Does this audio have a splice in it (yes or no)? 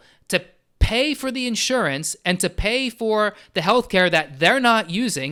no